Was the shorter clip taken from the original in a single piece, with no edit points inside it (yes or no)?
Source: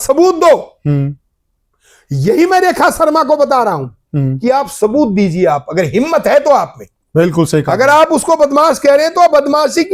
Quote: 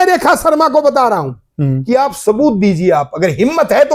yes